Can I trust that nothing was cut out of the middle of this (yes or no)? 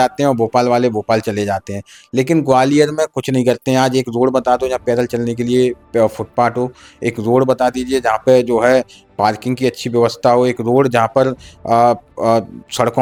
yes